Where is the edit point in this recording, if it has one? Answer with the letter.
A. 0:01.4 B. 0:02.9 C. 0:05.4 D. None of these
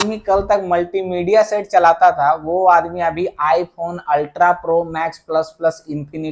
D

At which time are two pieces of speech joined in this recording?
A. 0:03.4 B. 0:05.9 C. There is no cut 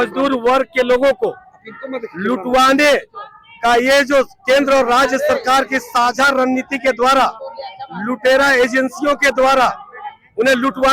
C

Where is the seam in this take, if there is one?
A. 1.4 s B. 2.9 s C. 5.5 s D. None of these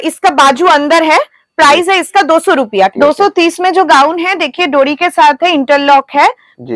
B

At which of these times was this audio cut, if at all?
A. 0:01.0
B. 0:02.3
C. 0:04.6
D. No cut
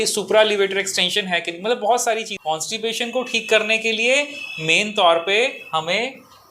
B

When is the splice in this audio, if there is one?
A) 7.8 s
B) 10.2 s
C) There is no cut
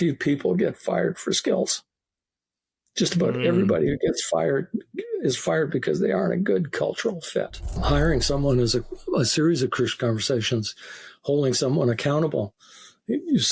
A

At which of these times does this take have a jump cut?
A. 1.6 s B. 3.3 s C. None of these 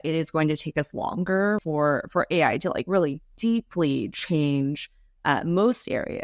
A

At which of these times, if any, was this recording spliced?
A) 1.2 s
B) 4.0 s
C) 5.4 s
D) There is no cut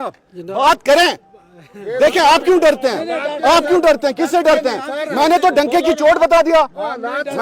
D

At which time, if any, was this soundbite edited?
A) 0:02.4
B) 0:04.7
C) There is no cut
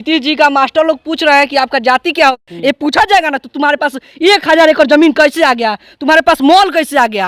A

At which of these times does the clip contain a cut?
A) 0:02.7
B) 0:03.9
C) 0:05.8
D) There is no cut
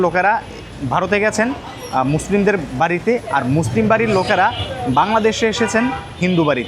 D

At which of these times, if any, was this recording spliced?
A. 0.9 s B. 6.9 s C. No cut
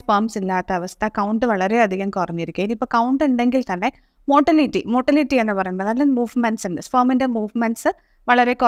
C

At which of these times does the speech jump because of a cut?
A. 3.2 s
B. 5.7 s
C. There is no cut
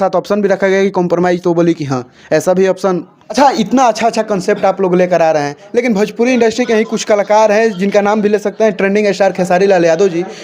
A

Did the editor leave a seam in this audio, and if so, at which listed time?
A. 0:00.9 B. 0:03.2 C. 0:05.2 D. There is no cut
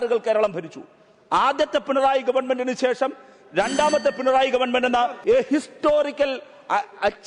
C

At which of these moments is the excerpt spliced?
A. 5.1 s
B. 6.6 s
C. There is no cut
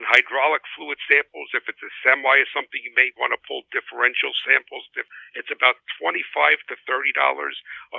A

